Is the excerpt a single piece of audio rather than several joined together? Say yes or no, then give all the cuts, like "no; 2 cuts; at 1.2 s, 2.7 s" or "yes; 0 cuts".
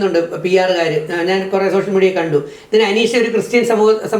yes; 0 cuts